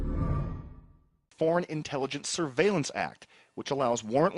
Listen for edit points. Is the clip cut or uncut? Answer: cut